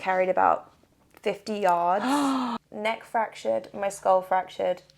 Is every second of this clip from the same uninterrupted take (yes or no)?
no